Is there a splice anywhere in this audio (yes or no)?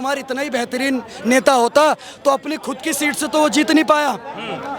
no